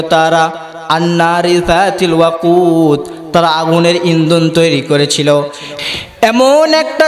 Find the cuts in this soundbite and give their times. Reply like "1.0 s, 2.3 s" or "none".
5.8 s